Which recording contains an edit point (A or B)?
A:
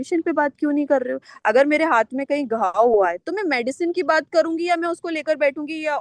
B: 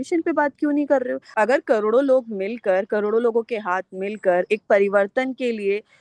B